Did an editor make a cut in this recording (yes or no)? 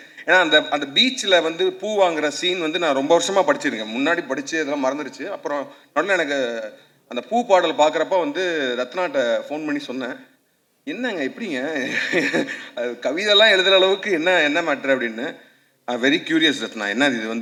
no